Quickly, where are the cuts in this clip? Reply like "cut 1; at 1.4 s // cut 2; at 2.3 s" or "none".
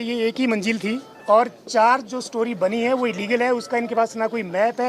cut 1; at 1.1 s